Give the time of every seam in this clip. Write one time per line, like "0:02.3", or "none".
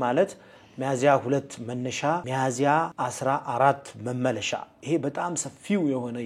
0:02.3
0:02.9